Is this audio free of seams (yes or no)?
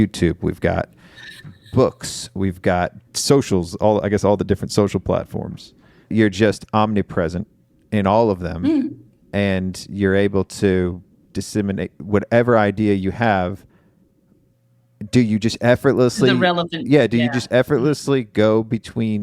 no